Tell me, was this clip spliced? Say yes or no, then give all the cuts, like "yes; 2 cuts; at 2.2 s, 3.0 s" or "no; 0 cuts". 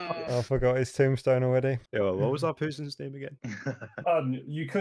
no; 0 cuts